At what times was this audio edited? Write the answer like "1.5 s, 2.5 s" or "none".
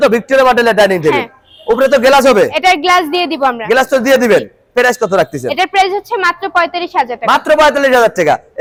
none